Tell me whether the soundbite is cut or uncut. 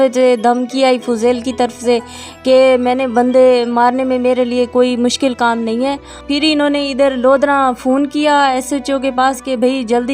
cut